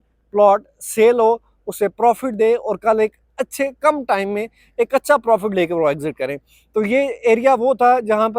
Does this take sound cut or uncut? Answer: uncut